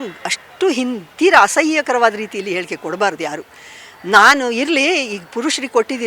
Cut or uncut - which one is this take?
uncut